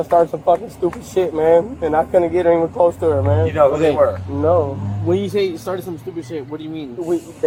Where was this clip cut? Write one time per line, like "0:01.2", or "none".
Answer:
none

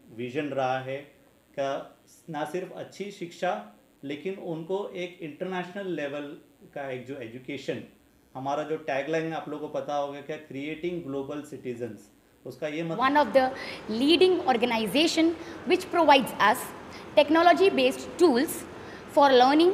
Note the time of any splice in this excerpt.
0:12.9

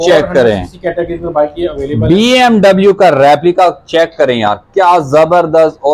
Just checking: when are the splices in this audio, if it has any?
none

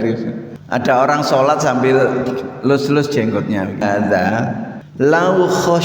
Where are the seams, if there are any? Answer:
0:03.8

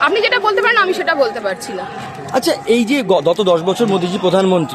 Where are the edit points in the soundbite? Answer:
none

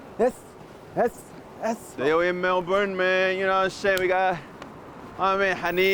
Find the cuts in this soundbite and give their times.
0:01.9

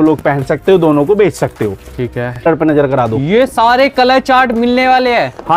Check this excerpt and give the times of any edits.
0:02.4

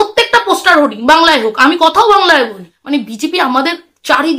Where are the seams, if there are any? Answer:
0:02.7

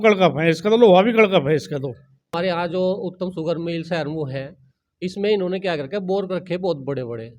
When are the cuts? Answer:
0:02.3

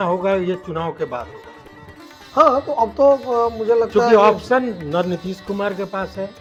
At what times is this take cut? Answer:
none

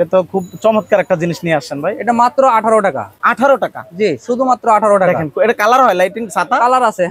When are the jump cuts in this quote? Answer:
none

